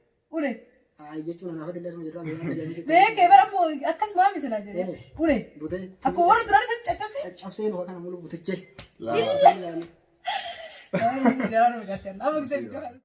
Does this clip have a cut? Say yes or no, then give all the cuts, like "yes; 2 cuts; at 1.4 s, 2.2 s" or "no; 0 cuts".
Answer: no; 0 cuts